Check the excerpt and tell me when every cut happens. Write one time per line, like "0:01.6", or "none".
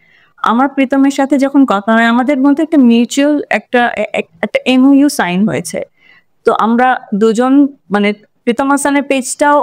none